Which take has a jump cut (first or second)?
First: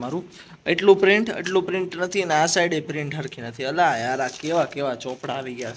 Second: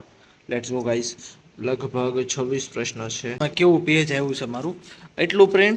second